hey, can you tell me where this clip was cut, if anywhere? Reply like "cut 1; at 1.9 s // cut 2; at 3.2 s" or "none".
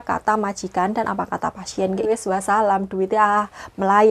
cut 1; at 2.1 s